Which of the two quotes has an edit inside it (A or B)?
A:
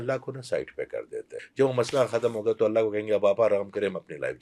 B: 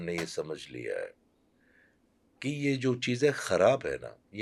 A